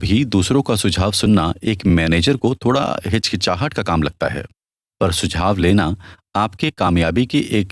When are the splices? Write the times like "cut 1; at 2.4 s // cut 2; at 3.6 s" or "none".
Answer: none